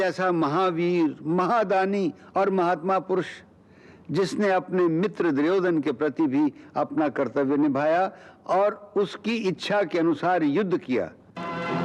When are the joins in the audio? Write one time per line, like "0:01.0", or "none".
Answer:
none